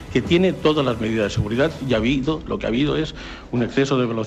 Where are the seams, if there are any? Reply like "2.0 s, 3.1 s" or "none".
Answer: none